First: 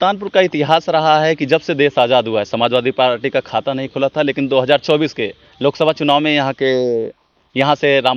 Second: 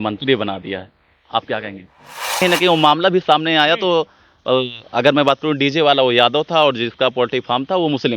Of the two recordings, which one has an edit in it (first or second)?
second